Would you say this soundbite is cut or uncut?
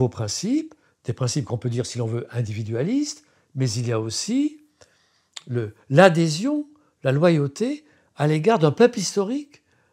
uncut